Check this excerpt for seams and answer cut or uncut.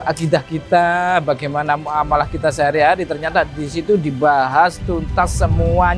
uncut